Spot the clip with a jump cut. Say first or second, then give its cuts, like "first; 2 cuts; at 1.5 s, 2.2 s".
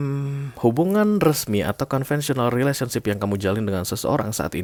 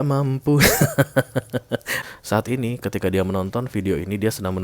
second; 1 cut; at 2.0 s